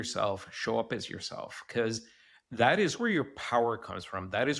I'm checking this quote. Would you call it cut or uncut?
cut